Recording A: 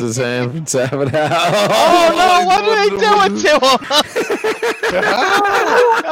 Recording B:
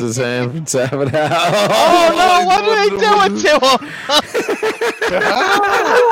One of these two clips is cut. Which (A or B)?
A